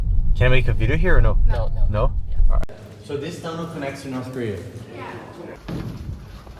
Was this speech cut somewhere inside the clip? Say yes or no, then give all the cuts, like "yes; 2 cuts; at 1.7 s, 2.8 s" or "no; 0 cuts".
yes; 2 cuts; at 2.7 s, 5.5 s